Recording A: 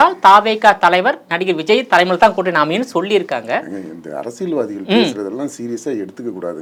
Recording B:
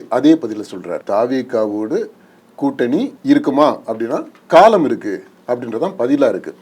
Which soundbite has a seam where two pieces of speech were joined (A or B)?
B